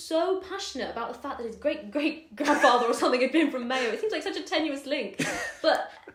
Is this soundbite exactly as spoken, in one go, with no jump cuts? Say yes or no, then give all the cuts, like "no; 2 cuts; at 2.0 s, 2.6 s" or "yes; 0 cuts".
yes; 0 cuts